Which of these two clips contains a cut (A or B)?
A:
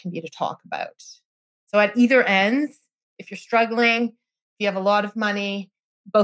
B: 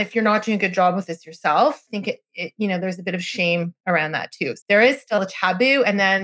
B